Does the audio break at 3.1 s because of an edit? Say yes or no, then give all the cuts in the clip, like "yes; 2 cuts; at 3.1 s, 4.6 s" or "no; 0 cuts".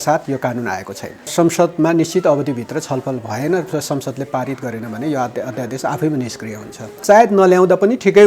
no; 2 cuts; at 1.3 s, 6.9 s